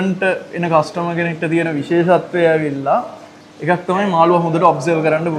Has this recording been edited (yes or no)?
no